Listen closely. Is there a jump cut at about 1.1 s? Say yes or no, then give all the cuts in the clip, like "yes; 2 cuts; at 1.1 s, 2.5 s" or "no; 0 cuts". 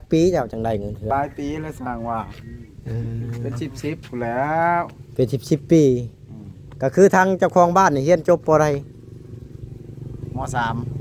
yes; 1 cut; at 1.1 s